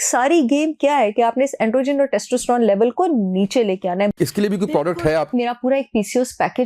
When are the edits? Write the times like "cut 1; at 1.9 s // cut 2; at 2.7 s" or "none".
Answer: cut 1; at 4.1 s // cut 2; at 5.3 s